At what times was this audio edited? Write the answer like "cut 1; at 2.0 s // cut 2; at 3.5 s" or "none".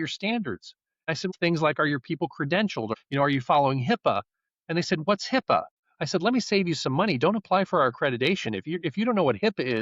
cut 1; at 1.2 s // cut 2; at 2.9 s // cut 3; at 5.7 s